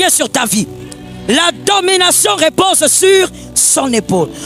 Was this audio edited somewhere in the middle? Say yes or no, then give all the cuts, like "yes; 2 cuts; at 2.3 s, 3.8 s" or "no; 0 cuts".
no; 0 cuts